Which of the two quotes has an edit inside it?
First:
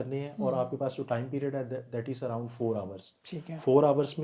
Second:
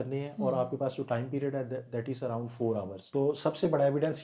second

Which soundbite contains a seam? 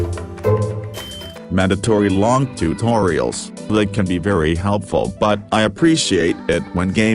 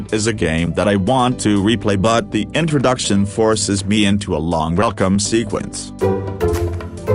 first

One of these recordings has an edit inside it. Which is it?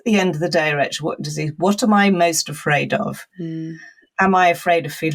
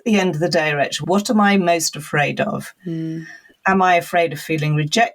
second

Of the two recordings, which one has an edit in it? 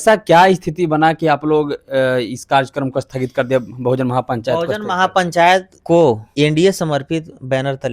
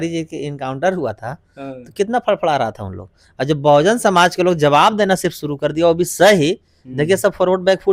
first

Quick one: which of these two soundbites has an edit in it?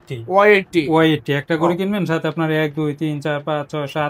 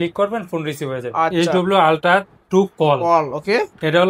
second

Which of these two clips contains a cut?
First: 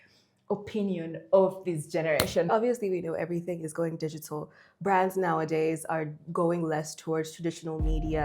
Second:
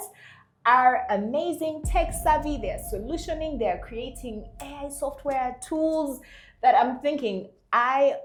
first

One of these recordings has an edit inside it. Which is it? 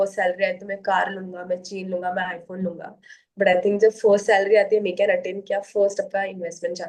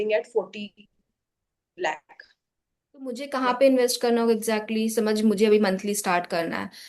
second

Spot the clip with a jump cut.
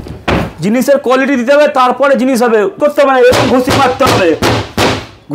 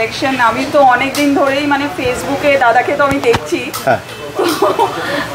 first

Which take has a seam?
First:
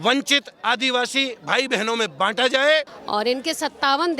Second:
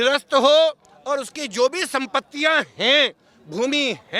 first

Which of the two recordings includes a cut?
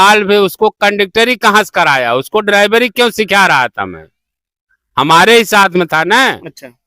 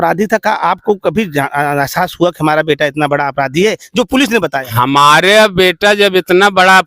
second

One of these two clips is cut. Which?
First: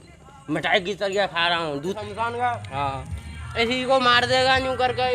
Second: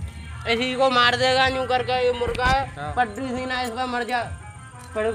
first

